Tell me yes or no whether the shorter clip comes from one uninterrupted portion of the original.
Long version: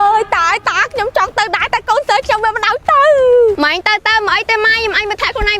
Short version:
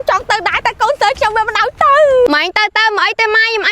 no